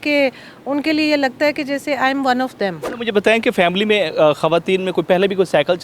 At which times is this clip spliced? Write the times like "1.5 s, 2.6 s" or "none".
2.9 s